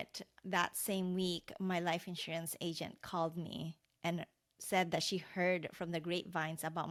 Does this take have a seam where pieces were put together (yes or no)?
no